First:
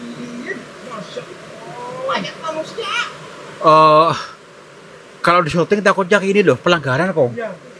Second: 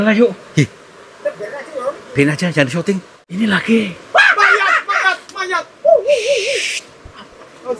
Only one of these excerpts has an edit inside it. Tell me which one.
second; 1 cut; at 3.2 s

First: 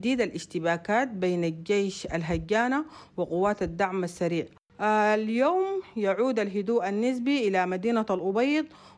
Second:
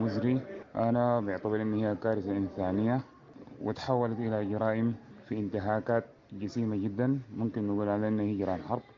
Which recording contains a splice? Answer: first; 1 cut; at 4.6 s

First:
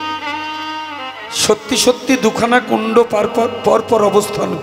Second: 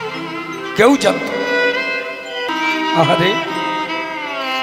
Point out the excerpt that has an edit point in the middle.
second; 1 cut; at 2.5 s

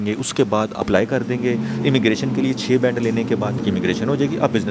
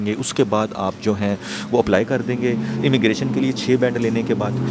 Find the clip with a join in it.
first; 2 cuts; at 0.8 s, 3.6 s

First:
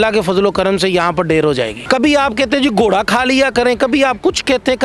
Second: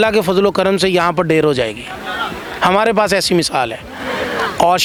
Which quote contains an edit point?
first; 1 cut; at 1.8 s

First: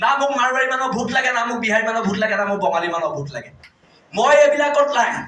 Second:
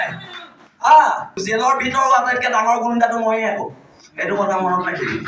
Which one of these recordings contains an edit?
second; 1 cut; at 1.4 s

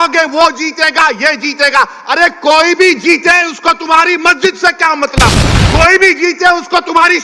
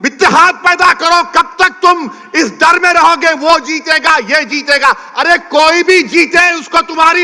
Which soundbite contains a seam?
first; 1 cut; at 5.5 s

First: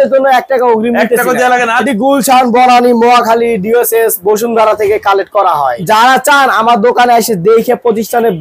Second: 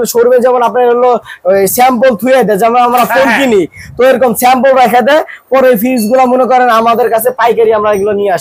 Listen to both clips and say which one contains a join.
first; 2 cuts; at 1.8 s, 5.8 s

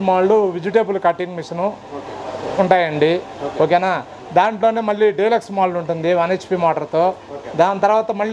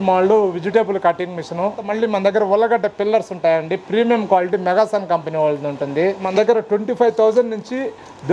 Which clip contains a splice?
second; 2 cuts; at 1.8 s, 6.3 s

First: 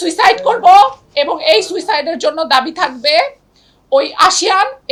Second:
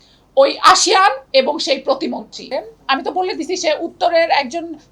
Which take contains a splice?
second; 1 cut; at 2.5 s

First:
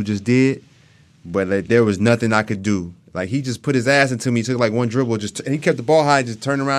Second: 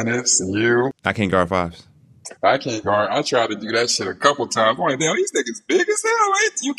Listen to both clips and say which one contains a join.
second; 1 cut; at 1.0 s

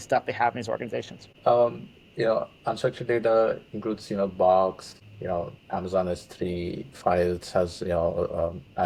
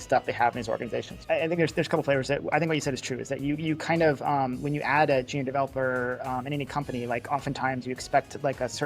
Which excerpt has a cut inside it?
second; 1 cut; at 1.1 s

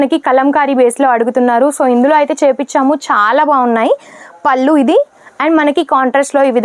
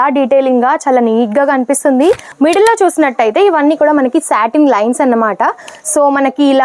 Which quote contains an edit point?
second; 1 cut; at 2.3 s

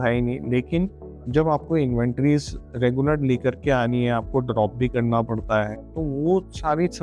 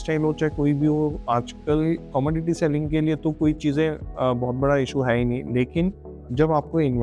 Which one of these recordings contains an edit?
second; 2 cuts; at 2.0 s, 4.1 s

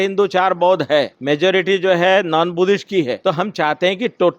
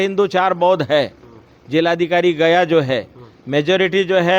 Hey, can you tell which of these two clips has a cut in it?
first; 2 cuts; at 1.2 s, 3.2 s

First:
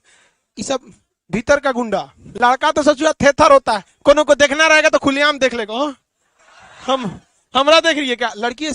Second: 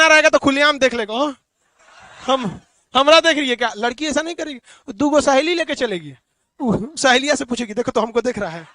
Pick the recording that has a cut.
first; 1 cut; at 2.2 s

